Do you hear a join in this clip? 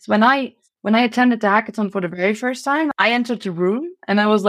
yes; 1 cut; at 2.9 s

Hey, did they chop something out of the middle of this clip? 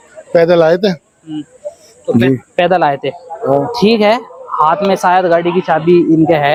no; 0 cuts

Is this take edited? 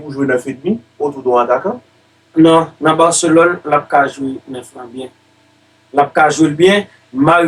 no; 0 cuts

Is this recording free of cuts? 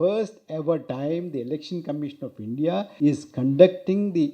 no; 2 cuts; at 0.9 s, 2.9 s

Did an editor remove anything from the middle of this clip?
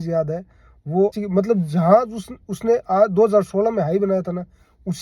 yes; 1 cut; at 1.1 s

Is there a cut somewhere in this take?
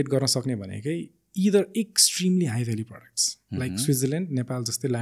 no; 0 cuts

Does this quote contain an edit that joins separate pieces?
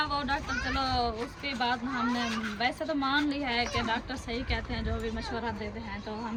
no; 0 cuts

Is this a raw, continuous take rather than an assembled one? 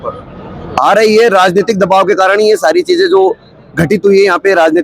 yes; 0 cuts

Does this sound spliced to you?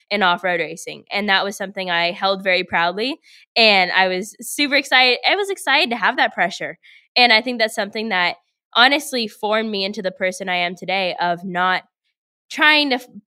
no; 0 cuts

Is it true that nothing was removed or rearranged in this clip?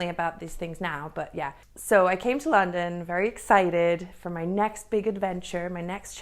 no; 1 cut; at 1.7 s

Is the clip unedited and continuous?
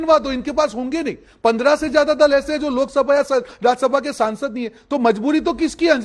yes; 0 cuts

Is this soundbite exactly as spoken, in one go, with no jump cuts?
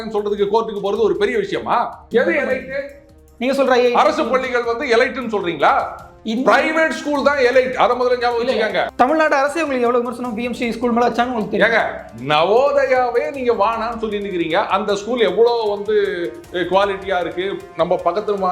no; 2 cuts; at 2.0 s, 8.9 s

